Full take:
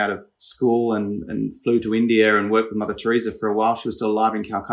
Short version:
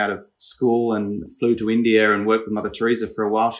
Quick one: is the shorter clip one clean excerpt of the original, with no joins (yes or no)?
no